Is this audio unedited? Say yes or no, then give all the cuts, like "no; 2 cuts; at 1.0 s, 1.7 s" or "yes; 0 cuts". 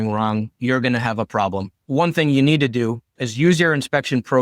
no; 1 cut; at 1.8 s